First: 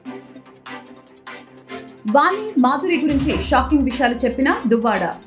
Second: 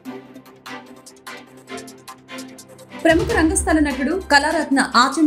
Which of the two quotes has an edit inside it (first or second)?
second